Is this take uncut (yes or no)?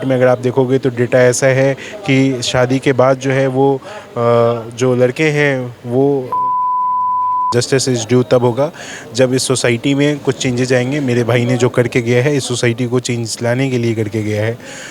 no